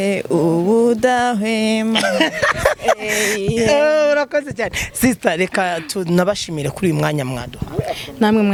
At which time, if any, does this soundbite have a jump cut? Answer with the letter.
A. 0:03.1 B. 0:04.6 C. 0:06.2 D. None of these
D